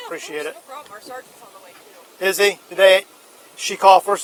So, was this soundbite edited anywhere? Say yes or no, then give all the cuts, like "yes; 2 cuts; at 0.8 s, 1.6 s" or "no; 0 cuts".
no; 0 cuts